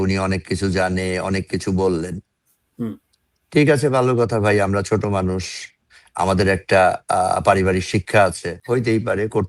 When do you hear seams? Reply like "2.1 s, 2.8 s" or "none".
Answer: 8.5 s